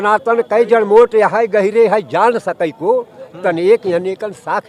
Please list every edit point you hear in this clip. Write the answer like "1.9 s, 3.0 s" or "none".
none